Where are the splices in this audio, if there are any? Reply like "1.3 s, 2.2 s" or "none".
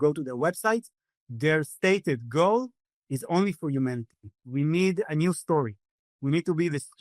4.4 s, 5.9 s